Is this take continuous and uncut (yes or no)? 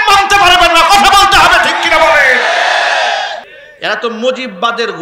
no